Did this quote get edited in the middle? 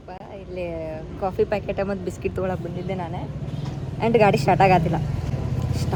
no; 0 cuts

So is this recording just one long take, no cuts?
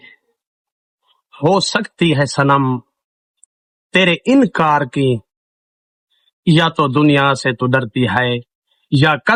yes; 0 cuts

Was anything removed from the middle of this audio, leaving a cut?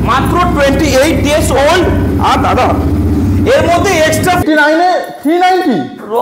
yes; 1 cut; at 4.4 s

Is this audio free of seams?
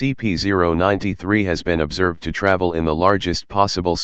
no; 1 cut; at 1.0 s

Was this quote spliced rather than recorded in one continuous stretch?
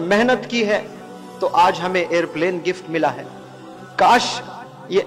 no; 0 cuts

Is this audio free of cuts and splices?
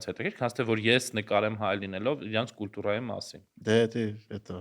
yes; 0 cuts

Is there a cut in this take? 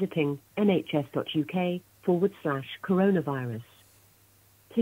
yes; 1 cut; at 1.9 s

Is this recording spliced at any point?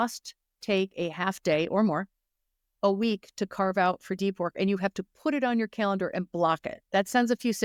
no; 0 cuts

